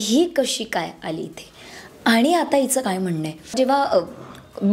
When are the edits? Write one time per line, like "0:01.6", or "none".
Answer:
0:03.5